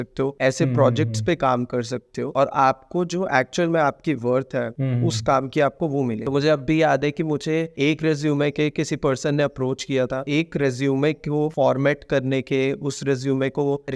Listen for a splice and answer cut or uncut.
cut